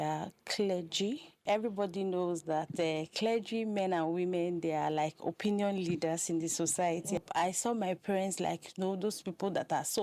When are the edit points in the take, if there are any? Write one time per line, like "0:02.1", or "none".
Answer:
0:01.4
0:07.2